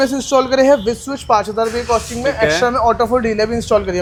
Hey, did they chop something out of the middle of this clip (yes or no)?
no